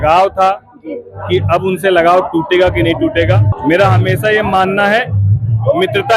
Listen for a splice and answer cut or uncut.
cut